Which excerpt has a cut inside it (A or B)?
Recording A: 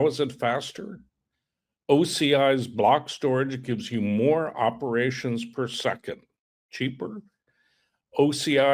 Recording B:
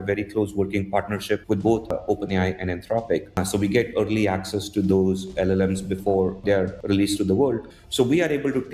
B